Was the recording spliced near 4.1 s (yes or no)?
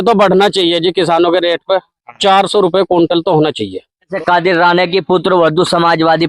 yes